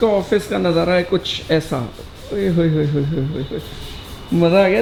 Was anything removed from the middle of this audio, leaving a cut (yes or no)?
no